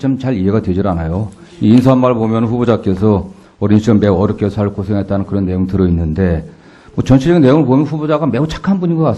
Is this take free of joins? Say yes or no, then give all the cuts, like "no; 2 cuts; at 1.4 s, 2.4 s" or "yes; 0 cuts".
yes; 0 cuts